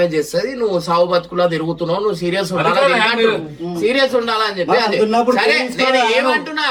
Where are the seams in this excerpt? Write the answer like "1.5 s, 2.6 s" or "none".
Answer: none